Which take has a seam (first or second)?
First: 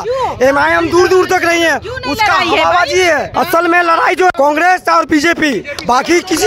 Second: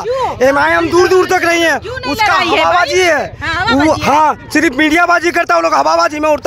first